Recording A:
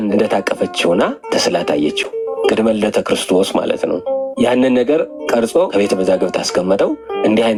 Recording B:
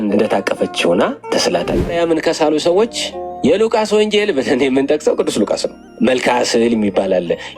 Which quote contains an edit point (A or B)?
B